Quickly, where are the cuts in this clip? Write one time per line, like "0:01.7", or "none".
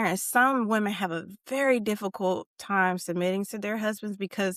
none

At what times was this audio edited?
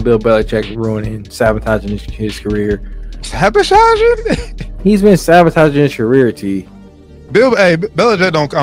none

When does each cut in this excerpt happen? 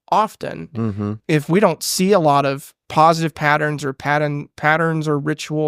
0:01.1
0:02.8

